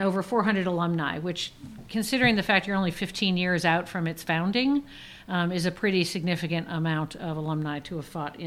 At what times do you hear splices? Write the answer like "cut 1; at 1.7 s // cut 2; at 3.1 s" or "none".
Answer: none